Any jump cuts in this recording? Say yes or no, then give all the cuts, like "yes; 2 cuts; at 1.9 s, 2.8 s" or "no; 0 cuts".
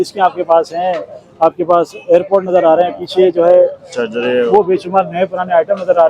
no; 0 cuts